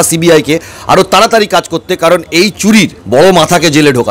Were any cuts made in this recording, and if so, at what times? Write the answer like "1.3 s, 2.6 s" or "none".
3.0 s